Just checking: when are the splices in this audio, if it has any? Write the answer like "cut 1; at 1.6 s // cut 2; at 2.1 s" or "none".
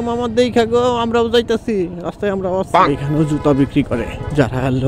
cut 1; at 2.8 s